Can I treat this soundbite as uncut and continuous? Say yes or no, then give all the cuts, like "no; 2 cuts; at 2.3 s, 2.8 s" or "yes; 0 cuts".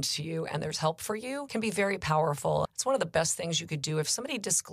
no; 2 cuts; at 1.4 s, 2.7 s